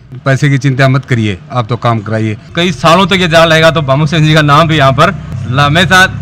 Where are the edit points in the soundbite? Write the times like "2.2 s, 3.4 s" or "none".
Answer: 2.5 s